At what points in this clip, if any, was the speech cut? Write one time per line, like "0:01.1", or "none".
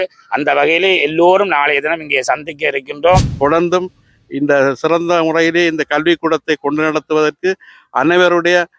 0:03.3